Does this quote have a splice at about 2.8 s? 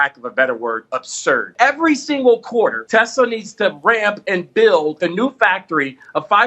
yes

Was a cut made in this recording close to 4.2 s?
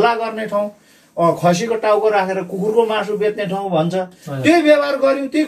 no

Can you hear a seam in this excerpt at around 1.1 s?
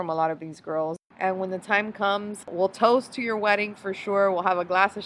yes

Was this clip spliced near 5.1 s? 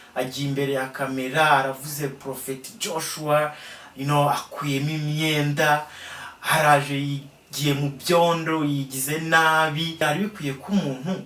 no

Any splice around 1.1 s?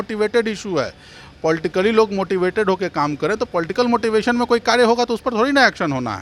no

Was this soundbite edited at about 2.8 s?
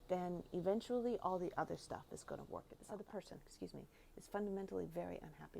yes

